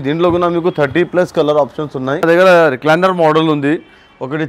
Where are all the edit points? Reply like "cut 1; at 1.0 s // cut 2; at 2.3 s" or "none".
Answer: cut 1; at 2.2 s